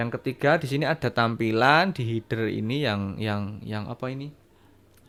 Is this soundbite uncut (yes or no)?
yes